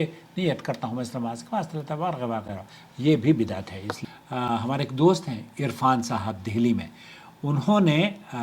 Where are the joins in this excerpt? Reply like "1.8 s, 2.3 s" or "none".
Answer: 3.9 s